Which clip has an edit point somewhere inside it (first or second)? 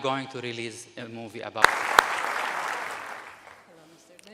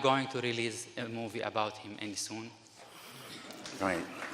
second